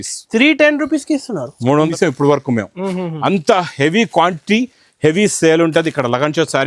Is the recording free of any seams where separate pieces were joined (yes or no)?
no